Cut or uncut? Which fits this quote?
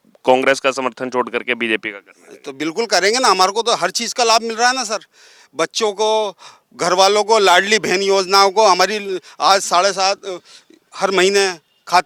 uncut